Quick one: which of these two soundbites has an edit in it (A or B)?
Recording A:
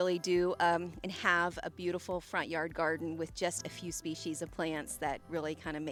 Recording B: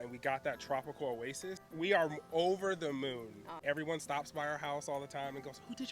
B